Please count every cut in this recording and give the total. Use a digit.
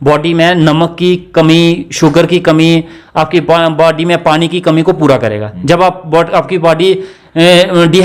0